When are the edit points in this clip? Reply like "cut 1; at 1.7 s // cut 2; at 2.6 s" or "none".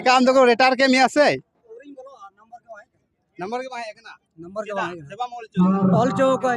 none

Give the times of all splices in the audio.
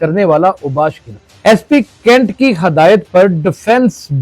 none

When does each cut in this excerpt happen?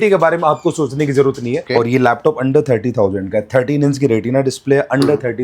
cut 1; at 1.7 s

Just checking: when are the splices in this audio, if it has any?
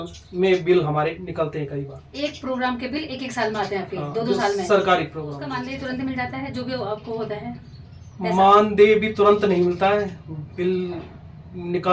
cut 1; at 5.5 s

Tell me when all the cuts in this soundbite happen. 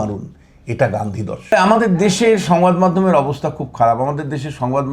cut 1; at 1.5 s

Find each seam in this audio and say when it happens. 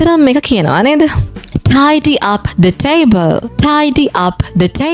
none

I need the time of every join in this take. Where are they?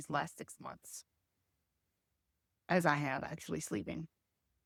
none

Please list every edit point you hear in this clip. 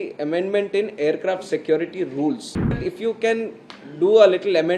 cut 1; at 2.9 s

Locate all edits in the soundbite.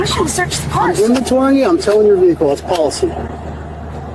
cut 1; at 2.6 s

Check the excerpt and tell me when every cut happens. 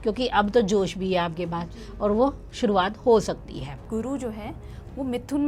cut 1; at 3.8 s

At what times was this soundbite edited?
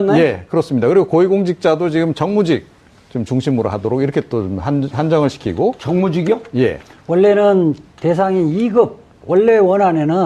none

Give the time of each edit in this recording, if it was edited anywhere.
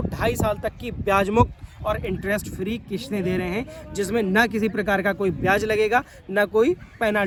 none

